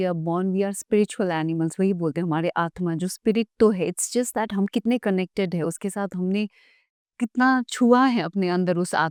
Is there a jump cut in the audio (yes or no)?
no